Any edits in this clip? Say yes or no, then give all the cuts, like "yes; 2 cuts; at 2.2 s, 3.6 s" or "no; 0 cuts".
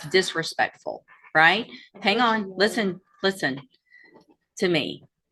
no; 0 cuts